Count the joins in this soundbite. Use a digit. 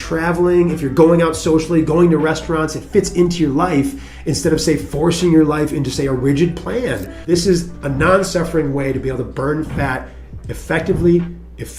1